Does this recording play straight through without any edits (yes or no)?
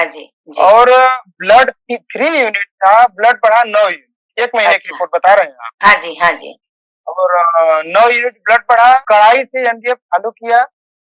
no